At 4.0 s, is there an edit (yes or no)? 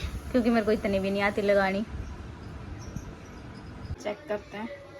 yes